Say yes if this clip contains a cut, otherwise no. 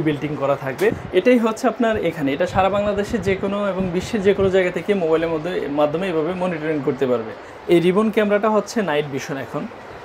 yes